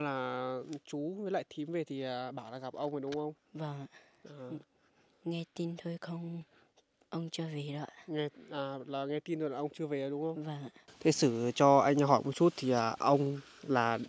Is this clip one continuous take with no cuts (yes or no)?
no